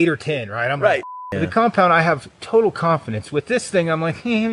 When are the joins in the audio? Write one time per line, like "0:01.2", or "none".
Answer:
0:01.1